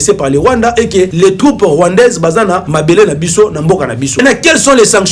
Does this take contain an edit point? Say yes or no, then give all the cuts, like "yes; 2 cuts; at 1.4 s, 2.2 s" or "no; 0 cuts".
yes; 3 cuts; at 1.1 s, 2.7 s, 4.2 s